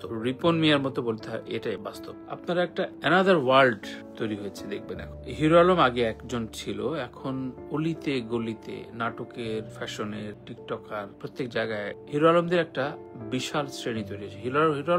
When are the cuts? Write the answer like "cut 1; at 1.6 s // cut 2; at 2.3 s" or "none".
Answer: cut 1; at 2.2 s